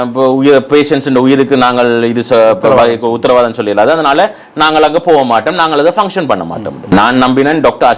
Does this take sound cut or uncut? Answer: cut